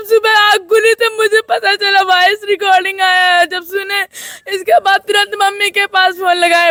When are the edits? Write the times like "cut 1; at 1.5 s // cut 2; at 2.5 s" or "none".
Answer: none